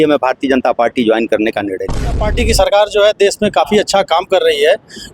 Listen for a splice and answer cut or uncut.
cut